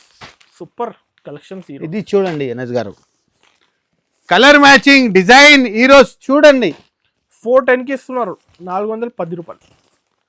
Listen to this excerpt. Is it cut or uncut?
uncut